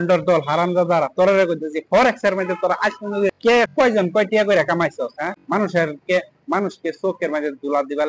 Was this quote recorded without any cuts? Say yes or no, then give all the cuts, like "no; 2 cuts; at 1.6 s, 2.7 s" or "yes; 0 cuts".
no; 2 cuts; at 3.5 s, 5.3 s